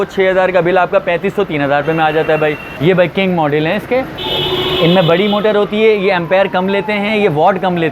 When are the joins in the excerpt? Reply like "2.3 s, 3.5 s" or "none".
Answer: 2.7 s